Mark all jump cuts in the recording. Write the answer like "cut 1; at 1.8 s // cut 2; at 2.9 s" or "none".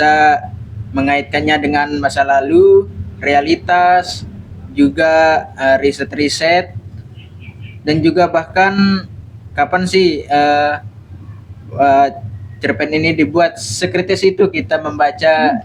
none

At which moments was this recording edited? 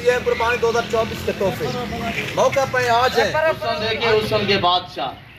cut 1; at 3.8 s

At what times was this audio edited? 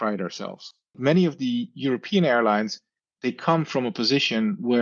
cut 1; at 1.0 s

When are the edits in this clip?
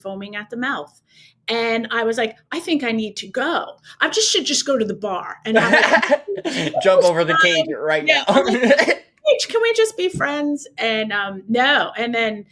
none

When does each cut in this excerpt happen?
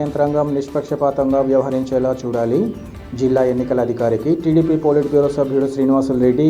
none

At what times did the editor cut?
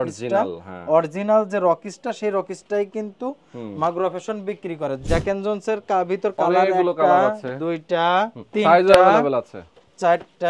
cut 1; at 5.0 s // cut 2; at 8.4 s

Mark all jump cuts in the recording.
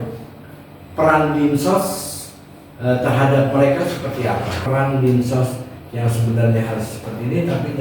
cut 1; at 4.6 s

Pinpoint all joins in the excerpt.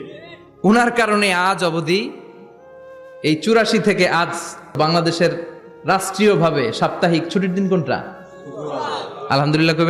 cut 1; at 4.8 s

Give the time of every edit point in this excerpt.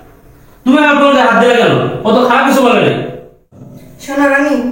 cut 1; at 3.7 s

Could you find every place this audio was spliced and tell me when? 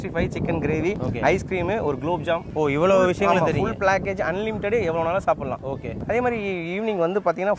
none

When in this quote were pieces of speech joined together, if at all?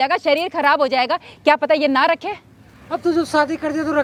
none

